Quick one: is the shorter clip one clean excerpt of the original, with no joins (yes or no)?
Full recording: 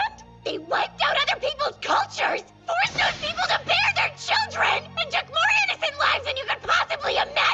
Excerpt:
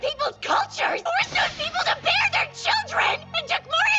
no